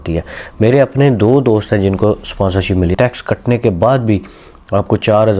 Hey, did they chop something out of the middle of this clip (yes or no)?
yes